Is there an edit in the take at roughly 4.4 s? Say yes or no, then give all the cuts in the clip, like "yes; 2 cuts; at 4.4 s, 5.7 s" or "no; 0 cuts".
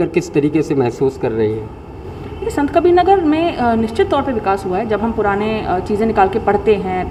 no; 0 cuts